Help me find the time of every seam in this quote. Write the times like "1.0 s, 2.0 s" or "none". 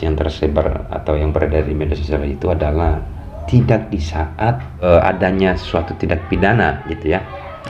4.8 s